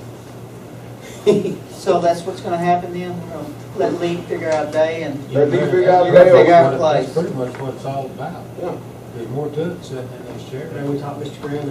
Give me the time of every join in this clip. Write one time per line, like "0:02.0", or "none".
none

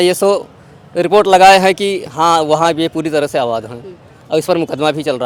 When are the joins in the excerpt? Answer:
none

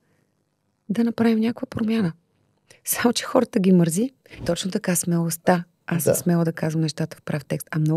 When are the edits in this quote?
0:04.4

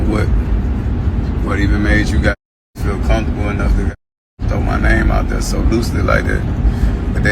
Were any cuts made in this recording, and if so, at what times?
0:06.0

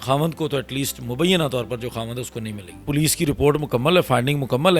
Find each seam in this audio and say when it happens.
0:02.8

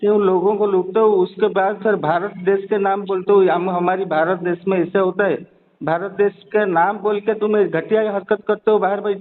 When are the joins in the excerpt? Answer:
none

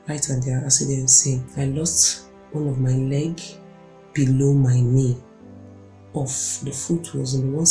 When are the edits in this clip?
0:01.5

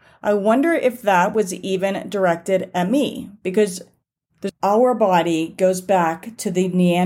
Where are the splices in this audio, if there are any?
0:04.5

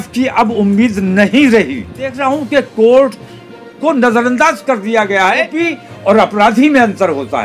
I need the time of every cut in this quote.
0:02.2
0:05.6

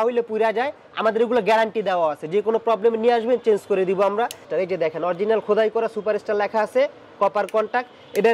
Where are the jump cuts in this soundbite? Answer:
0:04.4

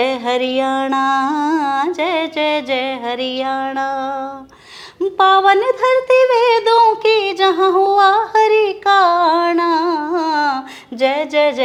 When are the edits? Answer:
none

